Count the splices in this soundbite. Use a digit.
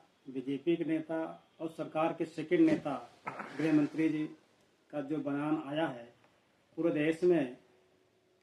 0